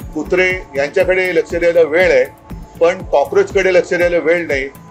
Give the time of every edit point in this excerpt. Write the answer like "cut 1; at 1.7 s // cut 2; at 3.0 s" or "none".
none